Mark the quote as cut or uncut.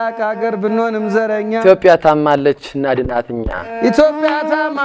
uncut